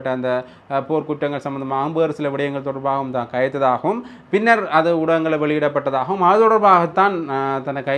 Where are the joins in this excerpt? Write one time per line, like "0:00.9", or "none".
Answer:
none